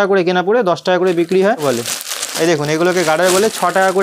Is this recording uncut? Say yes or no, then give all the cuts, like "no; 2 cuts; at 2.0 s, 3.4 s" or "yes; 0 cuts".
no; 1 cut; at 1.6 s